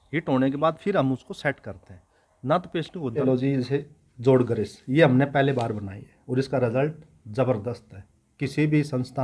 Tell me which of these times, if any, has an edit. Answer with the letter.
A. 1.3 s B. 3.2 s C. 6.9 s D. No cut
B